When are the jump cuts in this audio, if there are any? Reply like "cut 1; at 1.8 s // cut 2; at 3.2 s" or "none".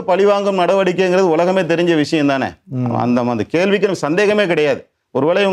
none